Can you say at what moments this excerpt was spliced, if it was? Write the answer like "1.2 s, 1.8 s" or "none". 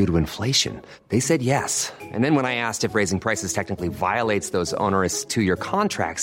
none